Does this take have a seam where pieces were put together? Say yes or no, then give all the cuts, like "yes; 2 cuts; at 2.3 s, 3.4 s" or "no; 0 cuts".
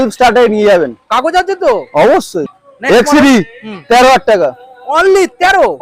yes; 1 cut; at 2.4 s